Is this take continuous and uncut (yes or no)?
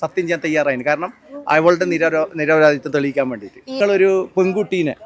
no